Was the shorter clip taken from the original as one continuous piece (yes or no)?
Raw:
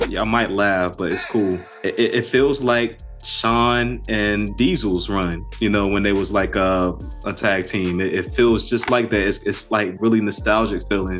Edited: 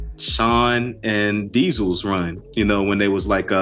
yes